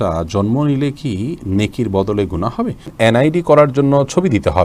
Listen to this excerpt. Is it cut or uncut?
cut